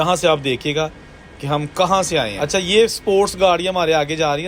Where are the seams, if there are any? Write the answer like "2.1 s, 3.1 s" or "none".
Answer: 2.3 s